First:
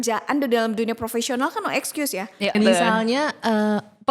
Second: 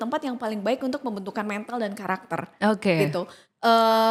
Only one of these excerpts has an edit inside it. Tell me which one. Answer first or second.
first